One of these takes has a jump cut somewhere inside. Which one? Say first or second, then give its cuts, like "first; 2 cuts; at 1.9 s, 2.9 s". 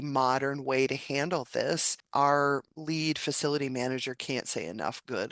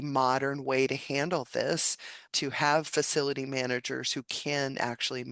first; 1 cut; at 2.0 s